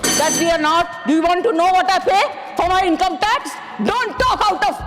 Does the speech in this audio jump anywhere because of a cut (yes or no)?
no